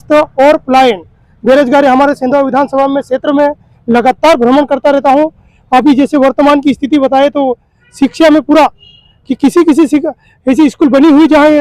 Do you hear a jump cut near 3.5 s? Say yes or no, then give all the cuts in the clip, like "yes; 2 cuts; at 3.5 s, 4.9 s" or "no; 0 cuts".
no; 0 cuts